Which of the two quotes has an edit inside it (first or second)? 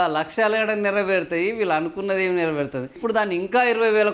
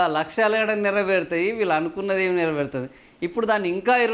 first